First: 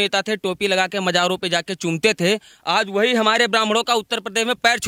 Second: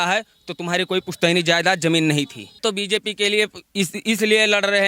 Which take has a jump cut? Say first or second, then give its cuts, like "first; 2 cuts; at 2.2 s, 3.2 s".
second; 1 cut; at 2.6 s